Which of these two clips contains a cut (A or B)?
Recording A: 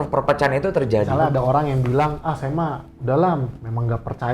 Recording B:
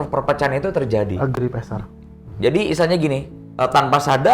A